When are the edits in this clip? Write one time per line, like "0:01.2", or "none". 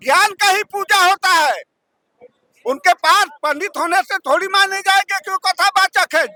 none

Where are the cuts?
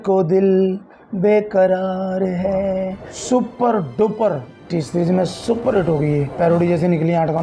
0:03.1
0:04.6

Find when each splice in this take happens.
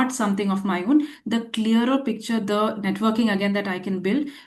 none

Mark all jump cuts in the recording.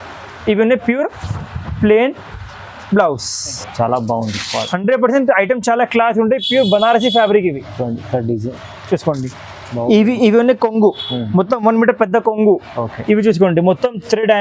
0:03.6

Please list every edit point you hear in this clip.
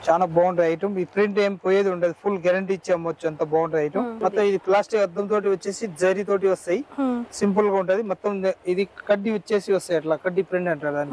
0:04.2

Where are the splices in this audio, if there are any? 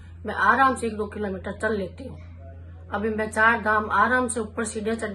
none

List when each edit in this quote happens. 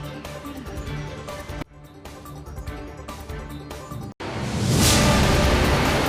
0:04.1

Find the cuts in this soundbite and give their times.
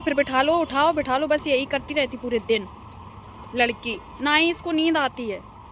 none

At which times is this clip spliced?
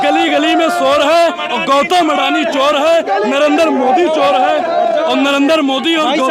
none

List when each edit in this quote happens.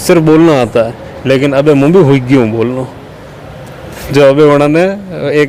none

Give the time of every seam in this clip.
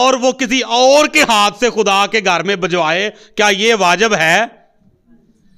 none

